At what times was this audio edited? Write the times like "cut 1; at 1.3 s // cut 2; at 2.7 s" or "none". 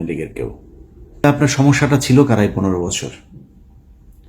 cut 1; at 1.2 s